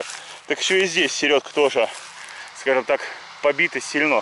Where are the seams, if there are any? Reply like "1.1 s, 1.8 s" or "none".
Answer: 3.2 s